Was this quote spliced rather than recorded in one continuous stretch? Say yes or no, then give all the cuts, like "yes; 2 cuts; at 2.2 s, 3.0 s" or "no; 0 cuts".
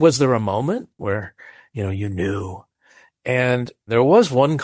yes; 2 cuts; at 1.0 s, 3.9 s